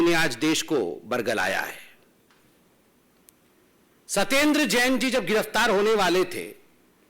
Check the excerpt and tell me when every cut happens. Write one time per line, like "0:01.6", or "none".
0:02.4